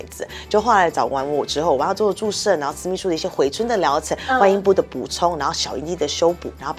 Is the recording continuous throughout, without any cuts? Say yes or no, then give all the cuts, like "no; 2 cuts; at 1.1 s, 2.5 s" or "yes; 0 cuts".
yes; 0 cuts